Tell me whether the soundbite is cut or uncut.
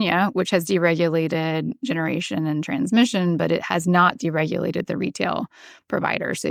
uncut